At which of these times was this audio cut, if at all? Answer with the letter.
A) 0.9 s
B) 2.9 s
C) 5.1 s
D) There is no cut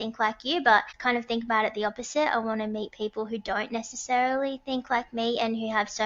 A